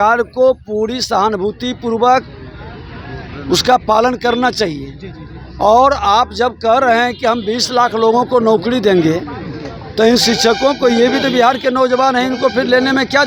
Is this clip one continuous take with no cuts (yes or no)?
yes